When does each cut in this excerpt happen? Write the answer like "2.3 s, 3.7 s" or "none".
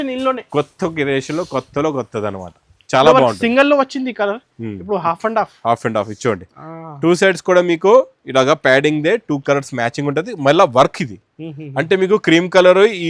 none